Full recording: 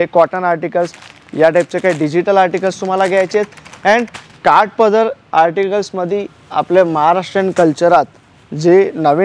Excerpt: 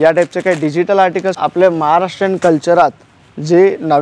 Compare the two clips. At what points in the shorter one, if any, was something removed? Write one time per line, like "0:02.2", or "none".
0:01.4